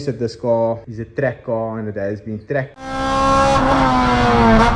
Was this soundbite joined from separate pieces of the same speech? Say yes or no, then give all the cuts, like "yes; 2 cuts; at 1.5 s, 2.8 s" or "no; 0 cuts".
yes; 2 cuts; at 0.9 s, 2.8 s